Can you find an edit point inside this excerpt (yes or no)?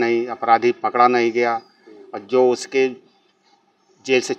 no